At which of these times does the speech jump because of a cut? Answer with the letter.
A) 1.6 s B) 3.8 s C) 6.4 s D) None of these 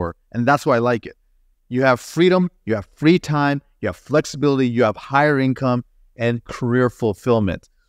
D